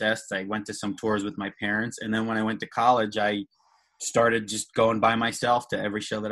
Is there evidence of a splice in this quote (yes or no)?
no